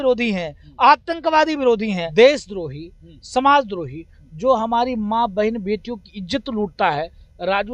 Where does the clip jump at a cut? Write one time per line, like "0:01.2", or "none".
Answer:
0:02.0